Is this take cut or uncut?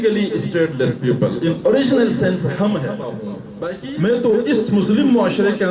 cut